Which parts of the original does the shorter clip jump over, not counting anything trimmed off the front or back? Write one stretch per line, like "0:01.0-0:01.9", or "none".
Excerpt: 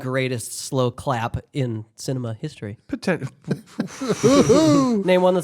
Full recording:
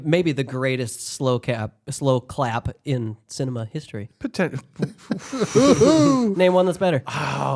0:01.4-0:02.3